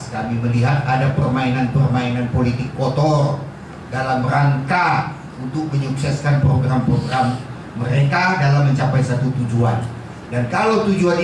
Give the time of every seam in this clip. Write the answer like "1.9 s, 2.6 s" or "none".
none